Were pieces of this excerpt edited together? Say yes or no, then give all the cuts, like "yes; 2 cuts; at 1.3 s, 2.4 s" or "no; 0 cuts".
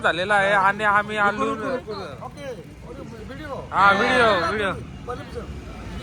no; 0 cuts